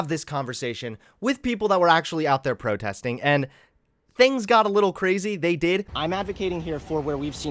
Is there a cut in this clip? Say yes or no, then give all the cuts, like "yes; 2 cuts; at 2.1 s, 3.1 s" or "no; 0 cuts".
yes; 1 cut; at 5.9 s